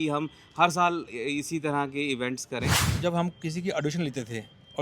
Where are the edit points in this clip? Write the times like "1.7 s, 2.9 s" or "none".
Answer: 2.8 s